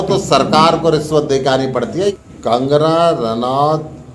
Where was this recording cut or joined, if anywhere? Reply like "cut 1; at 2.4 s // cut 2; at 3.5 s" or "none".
cut 1; at 2.1 s

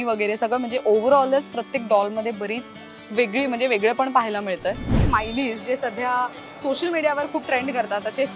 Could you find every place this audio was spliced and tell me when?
cut 1; at 5.0 s

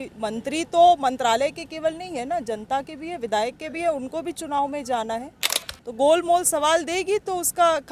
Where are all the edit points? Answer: none

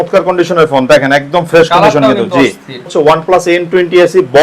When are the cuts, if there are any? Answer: cut 1; at 2.9 s

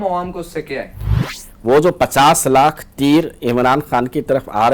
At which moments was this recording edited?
cut 1; at 1.4 s

